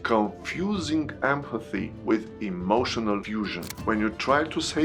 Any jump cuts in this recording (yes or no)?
yes